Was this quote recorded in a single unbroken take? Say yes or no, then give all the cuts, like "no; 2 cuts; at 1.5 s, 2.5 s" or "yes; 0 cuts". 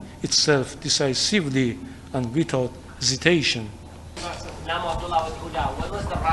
no; 1 cut; at 4.2 s